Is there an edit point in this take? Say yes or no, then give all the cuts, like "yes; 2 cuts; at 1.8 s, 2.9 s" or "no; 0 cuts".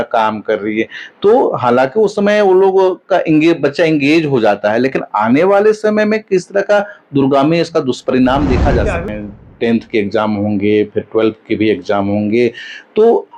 yes; 1 cut; at 9.1 s